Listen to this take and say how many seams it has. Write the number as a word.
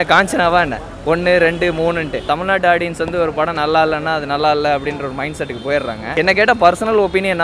two